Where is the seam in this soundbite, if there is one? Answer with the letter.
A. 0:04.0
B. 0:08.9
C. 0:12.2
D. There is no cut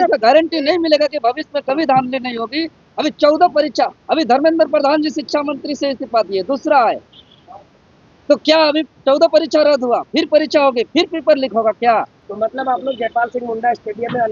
C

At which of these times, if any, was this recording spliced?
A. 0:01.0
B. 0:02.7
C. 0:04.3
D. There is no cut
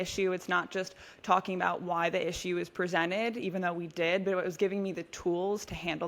D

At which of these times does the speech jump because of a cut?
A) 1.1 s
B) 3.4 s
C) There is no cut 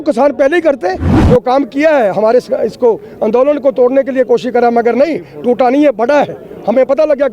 A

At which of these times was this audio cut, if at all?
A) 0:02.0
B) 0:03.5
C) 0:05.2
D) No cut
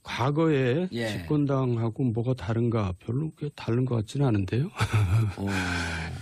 B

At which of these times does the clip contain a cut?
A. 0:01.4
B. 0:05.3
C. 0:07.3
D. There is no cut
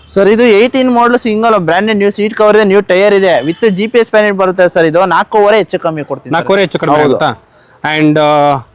D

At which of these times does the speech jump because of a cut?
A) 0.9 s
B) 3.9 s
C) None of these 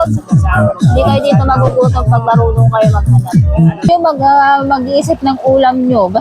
B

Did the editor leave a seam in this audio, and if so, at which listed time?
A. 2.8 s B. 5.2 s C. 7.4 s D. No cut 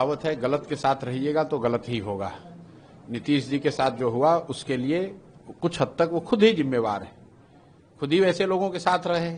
D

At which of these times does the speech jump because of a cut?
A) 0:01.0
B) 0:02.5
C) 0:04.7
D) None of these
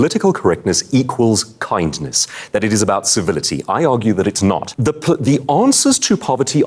C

